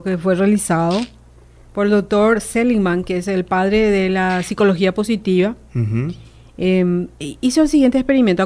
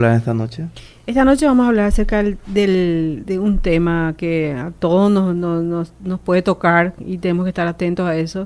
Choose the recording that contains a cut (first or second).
second